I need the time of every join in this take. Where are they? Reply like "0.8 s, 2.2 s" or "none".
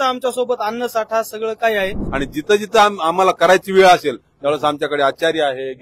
2.0 s